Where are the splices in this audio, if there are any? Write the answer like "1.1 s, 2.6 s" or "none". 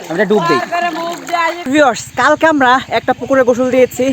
1.7 s